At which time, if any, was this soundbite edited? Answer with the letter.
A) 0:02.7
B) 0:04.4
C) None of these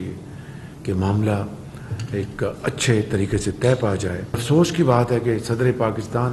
B